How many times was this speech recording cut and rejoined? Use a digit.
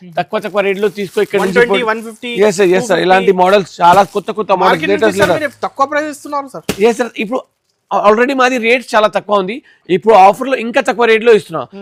0